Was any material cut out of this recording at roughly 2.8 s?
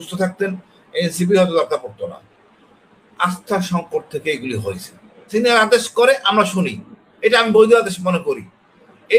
no; 1 cut; at 5.1 s

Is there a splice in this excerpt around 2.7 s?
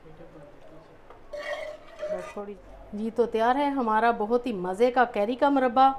yes; 1 cut; at 2.7 s

